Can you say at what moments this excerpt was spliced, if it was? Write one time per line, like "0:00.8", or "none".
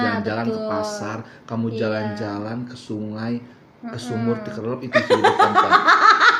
none